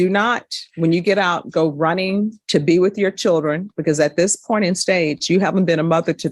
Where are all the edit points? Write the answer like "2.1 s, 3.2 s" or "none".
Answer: none